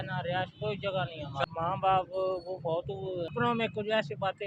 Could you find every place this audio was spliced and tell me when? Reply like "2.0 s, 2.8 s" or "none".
1.4 s, 3.3 s